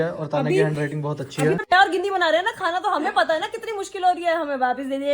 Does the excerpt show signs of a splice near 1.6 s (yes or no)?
yes